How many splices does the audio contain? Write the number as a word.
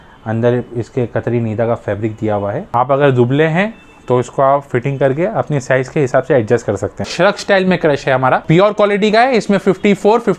three